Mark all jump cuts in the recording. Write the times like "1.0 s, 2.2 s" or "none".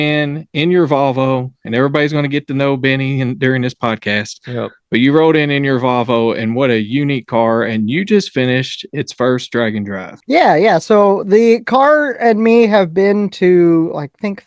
10.1 s